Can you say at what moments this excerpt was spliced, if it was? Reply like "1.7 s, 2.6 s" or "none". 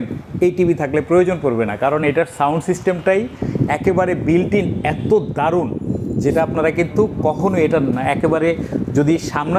none

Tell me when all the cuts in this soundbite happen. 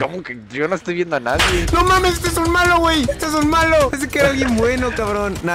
none

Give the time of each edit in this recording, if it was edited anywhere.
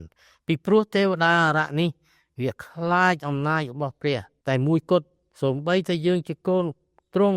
4.3 s

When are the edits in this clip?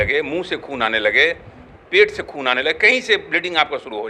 none

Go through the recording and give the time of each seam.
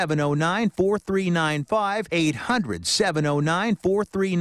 2.1 s

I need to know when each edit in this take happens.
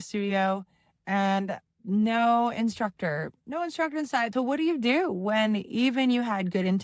4.3 s

